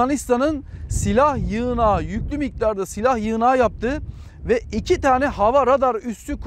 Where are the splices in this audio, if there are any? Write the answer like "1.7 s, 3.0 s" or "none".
none